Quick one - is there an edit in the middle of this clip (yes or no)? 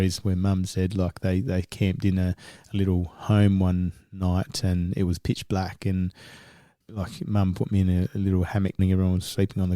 yes